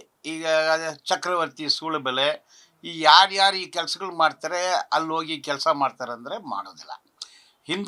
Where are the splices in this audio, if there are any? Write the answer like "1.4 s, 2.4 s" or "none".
none